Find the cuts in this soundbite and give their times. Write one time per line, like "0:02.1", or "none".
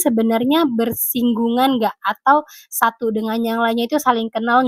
none